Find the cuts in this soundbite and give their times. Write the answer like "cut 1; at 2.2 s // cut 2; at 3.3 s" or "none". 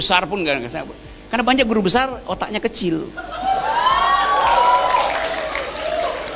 none